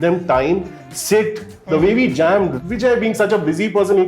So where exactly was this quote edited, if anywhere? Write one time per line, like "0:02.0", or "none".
0:02.6